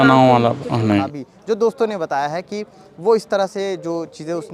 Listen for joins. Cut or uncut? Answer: cut